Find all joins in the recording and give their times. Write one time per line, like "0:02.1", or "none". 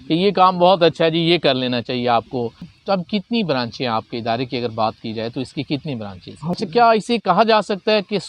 0:02.6
0:06.5